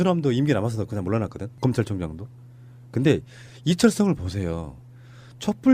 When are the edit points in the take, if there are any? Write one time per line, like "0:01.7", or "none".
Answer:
0:03.8